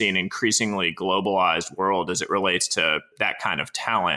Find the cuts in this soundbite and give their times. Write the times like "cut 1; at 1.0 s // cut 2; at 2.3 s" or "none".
cut 1; at 3.1 s